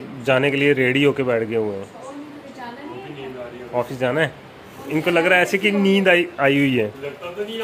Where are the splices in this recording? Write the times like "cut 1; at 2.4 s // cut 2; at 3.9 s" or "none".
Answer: none